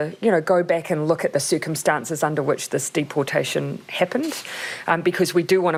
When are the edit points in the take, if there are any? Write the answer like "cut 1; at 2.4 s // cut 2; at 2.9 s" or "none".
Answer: none